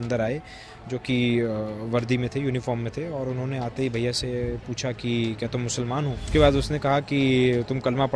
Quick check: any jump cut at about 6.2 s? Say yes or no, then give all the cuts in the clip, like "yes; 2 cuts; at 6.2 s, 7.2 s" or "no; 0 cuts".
yes; 1 cut; at 6.2 s